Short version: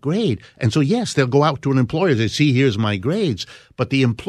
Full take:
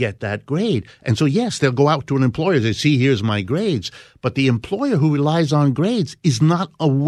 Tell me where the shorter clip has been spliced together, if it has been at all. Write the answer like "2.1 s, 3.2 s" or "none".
none